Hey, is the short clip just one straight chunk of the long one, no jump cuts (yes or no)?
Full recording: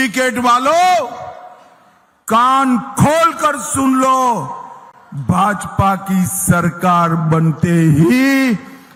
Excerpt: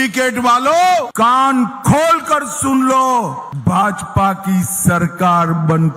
no